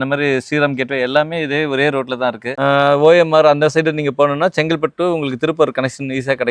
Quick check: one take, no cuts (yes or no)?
yes